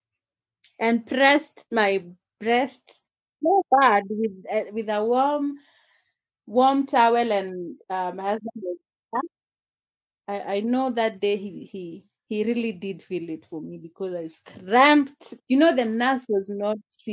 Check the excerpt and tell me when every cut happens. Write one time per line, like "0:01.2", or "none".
none